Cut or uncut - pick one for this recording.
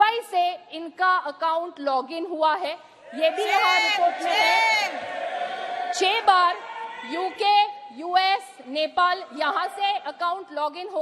uncut